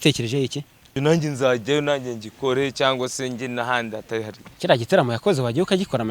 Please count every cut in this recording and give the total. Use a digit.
1